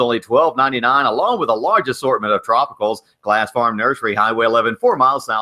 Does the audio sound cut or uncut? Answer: uncut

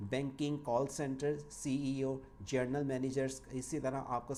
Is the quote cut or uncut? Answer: uncut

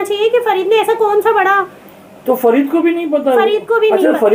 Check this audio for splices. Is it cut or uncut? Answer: uncut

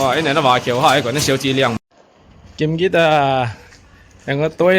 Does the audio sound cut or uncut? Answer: cut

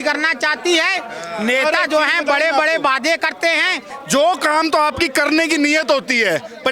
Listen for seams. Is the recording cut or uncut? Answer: cut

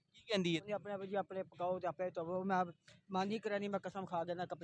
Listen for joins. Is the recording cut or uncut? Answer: uncut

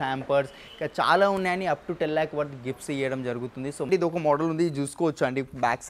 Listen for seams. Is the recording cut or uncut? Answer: cut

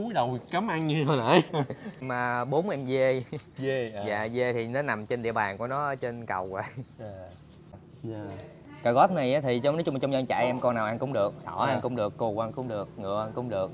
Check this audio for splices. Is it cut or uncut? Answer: cut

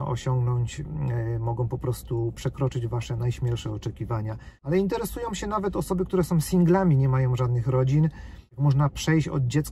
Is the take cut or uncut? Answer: cut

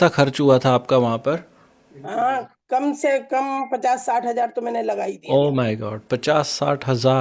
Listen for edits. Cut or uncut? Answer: uncut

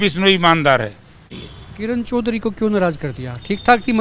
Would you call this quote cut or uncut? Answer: cut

